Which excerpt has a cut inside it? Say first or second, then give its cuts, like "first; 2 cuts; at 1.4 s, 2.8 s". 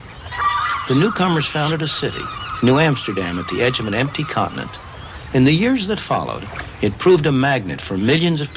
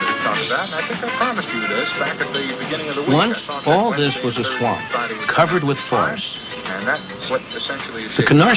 second; 1 cut; at 3.3 s